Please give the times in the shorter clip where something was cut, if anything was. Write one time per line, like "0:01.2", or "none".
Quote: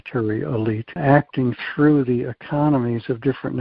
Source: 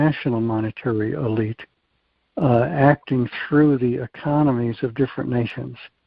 0:01.0